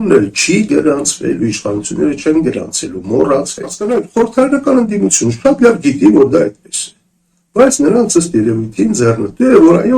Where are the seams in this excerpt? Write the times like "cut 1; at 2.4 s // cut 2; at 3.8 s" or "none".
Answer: cut 1; at 3.8 s